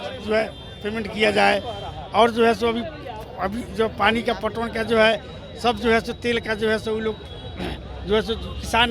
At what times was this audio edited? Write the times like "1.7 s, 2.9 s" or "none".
none